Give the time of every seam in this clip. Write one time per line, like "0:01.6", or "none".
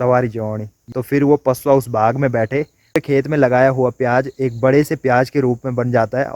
0:00.8
0:03.0